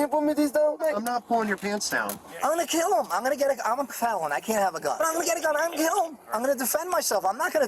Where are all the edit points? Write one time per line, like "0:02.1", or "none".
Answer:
0:00.8
0:02.2
0:04.9
0:06.2